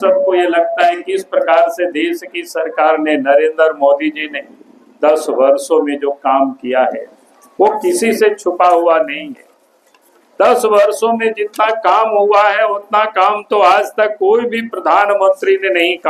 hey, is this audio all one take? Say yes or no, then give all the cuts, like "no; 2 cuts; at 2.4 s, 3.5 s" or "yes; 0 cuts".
yes; 0 cuts